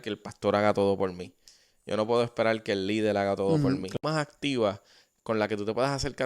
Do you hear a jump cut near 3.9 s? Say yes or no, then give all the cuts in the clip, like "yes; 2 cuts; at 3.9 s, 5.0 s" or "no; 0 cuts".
yes; 1 cut; at 3.9 s